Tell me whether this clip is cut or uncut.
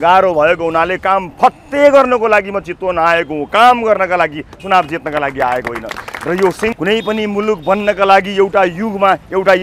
cut